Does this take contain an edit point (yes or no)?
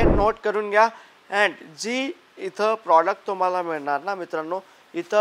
no